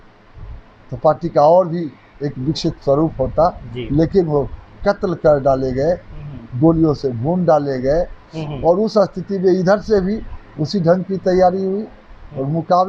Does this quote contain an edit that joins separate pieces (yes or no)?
no